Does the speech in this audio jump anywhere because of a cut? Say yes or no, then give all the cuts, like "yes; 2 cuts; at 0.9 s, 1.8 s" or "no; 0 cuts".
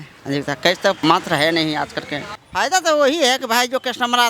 yes; 2 cuts; at 1.0 s, 2.2 s